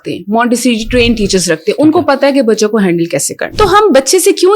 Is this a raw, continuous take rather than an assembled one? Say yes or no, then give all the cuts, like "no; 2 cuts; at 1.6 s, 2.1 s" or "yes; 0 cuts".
no; 1 cut; at 3.4 s